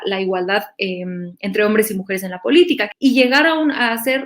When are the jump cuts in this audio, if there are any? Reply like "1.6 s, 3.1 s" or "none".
2.9 s